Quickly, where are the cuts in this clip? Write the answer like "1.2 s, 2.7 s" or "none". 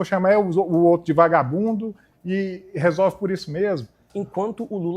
4.1 s